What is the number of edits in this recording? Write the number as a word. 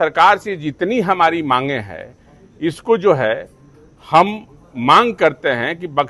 zero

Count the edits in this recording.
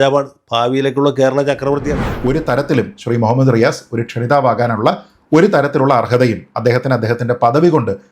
one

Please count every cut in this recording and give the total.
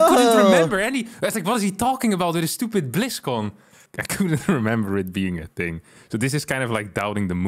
one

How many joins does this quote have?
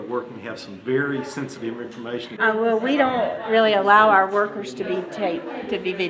one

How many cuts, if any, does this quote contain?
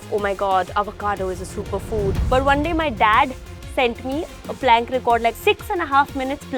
two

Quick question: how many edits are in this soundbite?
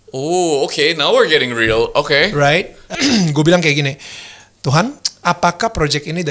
two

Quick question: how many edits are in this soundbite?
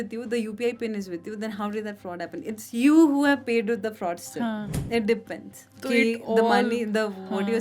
one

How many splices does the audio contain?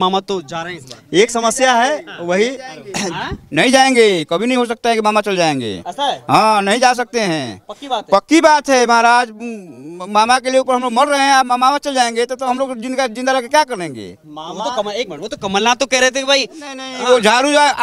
zero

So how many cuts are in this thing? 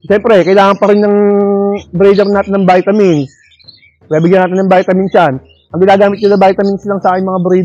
zero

